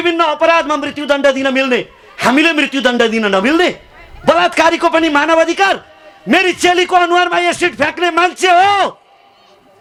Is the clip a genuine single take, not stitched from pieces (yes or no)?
yes